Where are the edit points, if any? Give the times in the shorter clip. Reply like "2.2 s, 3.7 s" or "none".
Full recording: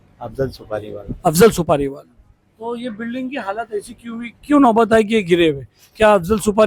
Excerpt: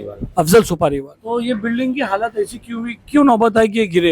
1.1 s